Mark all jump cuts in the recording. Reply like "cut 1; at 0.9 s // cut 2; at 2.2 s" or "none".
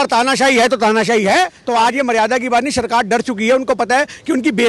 cut 1; at 1.6 s